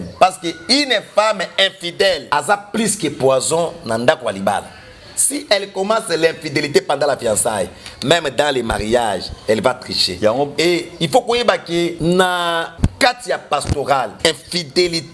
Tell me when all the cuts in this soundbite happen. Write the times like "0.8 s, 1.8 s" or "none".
2.3 s, 12.0 s, 12.7 s, 14.1 s